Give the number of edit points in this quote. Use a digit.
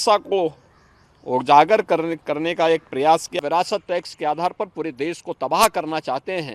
1